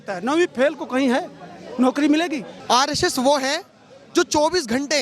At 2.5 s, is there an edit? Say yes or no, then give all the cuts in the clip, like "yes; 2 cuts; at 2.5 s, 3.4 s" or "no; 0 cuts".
yes; 1 cut; at 2.5 s